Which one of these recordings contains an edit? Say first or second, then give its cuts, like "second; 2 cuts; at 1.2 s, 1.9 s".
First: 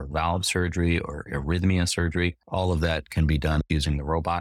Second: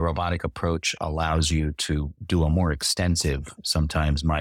first; 2 cuts; at 2.4 s, 3.6 s